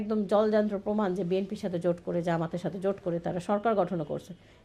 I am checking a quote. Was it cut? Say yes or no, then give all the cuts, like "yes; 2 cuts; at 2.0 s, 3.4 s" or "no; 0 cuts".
no; 0 cuts